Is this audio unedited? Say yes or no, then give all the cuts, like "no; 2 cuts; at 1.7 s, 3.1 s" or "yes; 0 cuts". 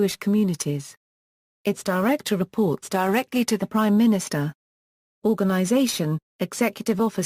yes; 0 cuts